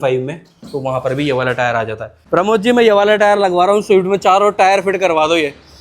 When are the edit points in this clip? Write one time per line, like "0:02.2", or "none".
0:02.1